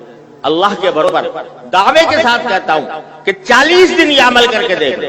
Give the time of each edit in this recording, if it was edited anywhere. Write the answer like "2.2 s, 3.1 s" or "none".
1.1 s